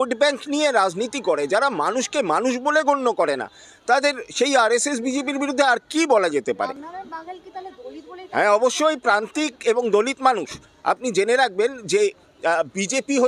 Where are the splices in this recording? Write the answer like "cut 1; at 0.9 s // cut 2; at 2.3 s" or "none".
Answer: none